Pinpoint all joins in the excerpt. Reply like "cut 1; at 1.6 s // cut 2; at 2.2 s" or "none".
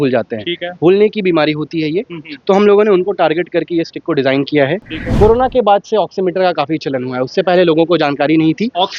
cut 1; at 5.0 s

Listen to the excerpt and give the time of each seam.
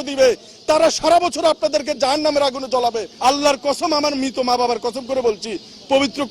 cut 1; at 3.1 s

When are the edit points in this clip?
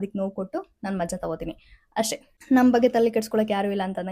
cut 1; at 2.3 s

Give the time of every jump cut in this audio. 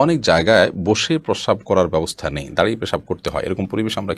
none

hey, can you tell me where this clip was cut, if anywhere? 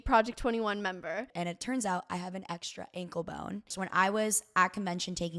cut 1; at 1.3 s // cut 2; at 3.7 s

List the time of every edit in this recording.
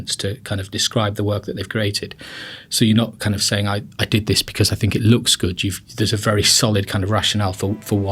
cut 1; at 6.5 s

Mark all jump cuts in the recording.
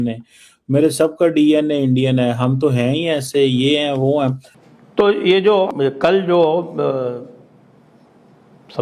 cut 1; at 4.5 s // cut 2; at 5.7 s

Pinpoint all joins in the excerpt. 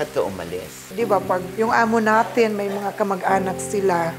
cut 1; at 0.9 s

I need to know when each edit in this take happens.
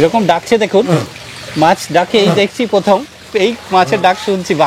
none

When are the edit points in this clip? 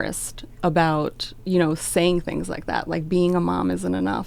none

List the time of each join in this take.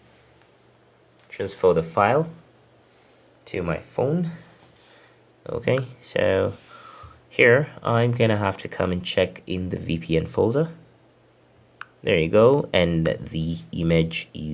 none

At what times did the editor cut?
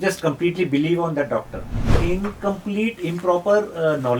cut 1; at 2.0 s

